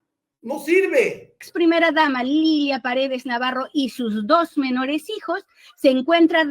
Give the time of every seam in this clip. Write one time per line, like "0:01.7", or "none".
0:01.4